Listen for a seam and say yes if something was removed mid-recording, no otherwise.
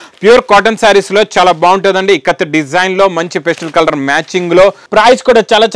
yes